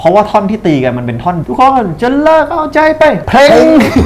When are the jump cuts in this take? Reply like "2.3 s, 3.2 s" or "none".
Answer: 1.4 s